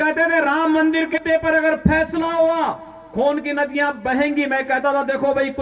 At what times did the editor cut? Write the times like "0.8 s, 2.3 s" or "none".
1.1 s